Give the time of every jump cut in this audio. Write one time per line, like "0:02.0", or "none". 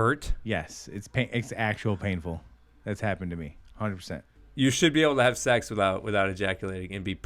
0:04.4